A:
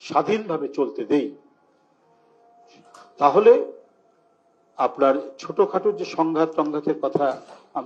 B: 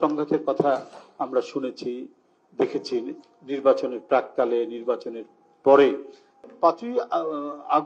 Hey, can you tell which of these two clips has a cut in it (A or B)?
B